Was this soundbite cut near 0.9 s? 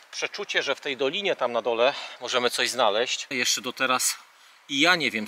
no; 1 cut; at 3.4 s

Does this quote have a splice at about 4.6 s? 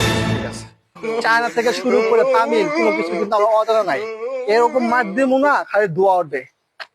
no; 1 cut; at 1.0 s

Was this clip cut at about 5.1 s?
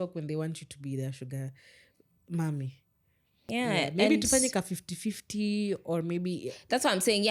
no; 1 cut; at 3.5 s

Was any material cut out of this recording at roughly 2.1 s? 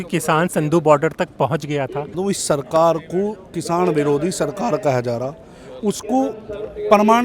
yes; 1 cut; at 2.1 s

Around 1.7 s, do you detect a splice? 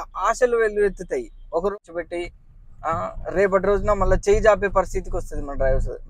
yes; 1 cut; at 1.7 s

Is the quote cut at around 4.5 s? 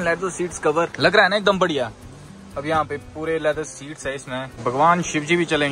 yes; 2 cuts; at 0.9 s, 4.5 s

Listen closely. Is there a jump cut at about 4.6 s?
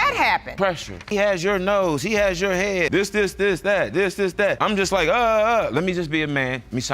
yes; 3 cuts; at 1.0 s, 2.9 s, 4.6 s

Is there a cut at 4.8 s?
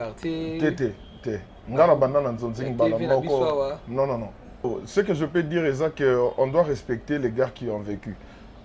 yes; 1 cut; at 4.8 s

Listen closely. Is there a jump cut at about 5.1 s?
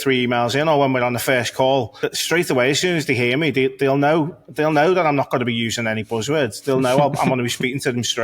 no; 1 cut; at 2.0 s

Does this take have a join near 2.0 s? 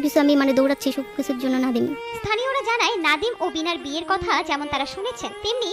no; 0 cuts

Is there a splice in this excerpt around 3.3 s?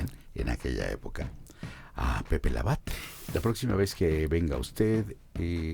yes; 1 cut; at 3.3 s

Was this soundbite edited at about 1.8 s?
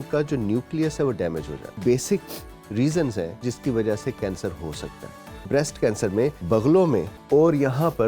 yes; 5 cuts; at 1.8 s, 3.3 s, 5.5 s, 6.4 s, 7.1 s

